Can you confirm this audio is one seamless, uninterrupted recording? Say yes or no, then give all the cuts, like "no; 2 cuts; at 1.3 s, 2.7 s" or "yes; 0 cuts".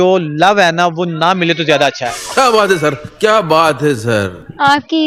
yes; 0 cuts